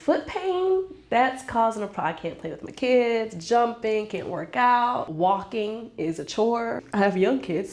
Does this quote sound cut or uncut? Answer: cut